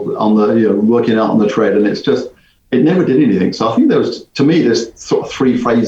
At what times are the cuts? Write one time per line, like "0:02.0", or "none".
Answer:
none